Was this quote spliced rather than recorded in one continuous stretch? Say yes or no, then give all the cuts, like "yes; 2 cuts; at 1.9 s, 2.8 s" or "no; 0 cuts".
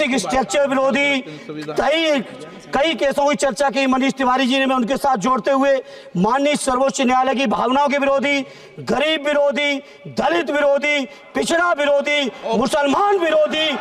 no; 0 cuts